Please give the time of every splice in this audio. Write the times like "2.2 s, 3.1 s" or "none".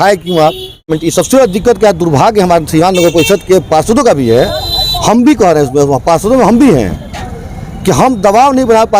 1.0 s